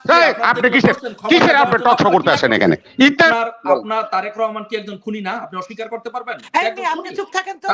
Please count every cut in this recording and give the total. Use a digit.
1